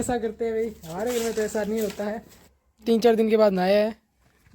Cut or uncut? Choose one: cut